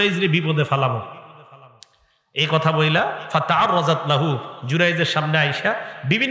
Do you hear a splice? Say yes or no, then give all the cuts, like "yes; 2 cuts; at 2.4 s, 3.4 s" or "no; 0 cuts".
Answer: no; 0 cuts